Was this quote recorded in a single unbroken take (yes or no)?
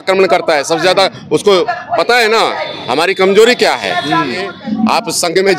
no